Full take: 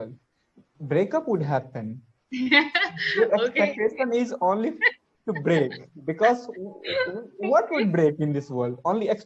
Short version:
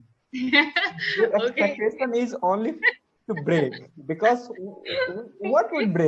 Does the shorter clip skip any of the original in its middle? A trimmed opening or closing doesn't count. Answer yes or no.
no